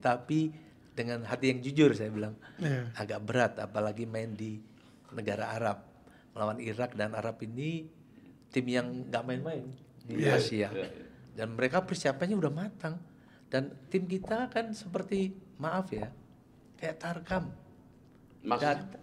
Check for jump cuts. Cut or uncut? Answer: uncut